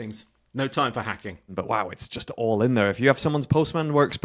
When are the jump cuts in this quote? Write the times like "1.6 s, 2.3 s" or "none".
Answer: 1.5 s